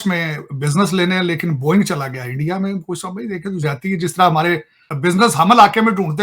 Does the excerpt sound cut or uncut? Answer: cut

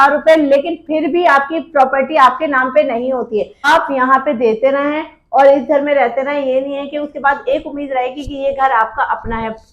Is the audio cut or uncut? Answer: cut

